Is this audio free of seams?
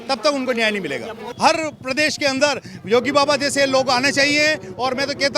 no; 1 cut; at 1.3 s

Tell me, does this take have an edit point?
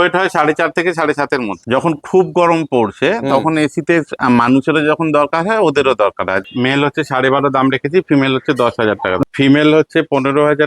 yes; 3 cuts; at 1.6 s, 6.4 s, 9.2 s

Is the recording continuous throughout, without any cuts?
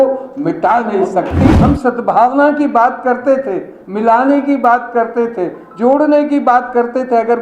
no; 1 cut; at 1.5 s

